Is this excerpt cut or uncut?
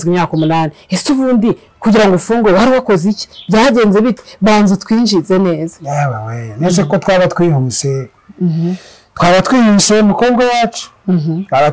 uncut